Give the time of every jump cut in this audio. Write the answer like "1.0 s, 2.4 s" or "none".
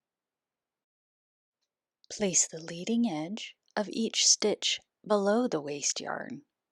1.5 s